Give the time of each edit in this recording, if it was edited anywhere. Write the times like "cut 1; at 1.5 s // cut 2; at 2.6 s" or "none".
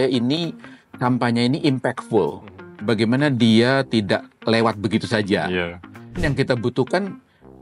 cut 1; at 2.8 s // cut 2; at 6.2 s